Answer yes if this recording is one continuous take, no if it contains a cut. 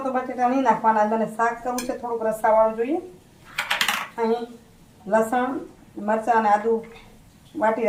yes